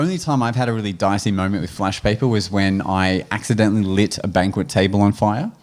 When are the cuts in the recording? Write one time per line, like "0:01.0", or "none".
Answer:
none